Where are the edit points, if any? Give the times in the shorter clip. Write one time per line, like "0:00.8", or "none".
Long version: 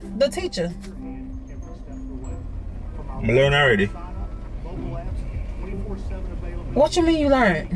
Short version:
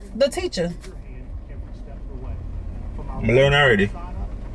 none